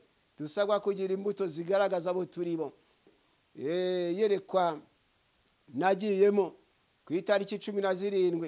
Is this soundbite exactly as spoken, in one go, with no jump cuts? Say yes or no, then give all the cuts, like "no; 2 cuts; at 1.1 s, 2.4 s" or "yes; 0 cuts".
no; 1 cut; at 3.2 s